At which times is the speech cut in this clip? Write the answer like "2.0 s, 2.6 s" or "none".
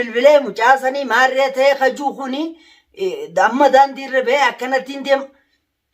none